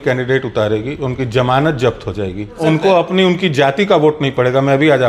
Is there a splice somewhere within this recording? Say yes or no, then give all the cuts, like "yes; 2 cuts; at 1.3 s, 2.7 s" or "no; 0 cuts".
yes; 1 cut; at 2.6 s